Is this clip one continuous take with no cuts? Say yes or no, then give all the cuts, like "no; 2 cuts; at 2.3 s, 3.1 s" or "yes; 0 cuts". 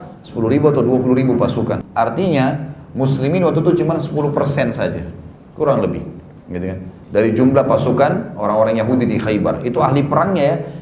no; 1 cut; at 1.8 s